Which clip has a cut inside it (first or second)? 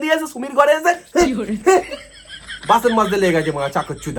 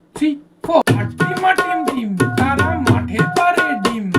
second